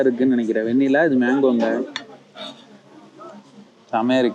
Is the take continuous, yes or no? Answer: yes